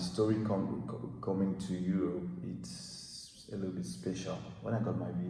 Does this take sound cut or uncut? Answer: uncut